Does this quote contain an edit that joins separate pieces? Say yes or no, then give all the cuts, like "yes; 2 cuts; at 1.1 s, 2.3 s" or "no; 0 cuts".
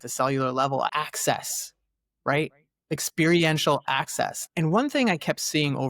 yes; 2 cuts; at 0.9 s, 4.4 s